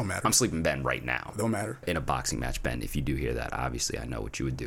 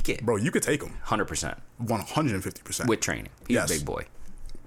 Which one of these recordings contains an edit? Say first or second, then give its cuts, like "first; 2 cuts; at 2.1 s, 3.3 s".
first; 1 cut; at 1.8 s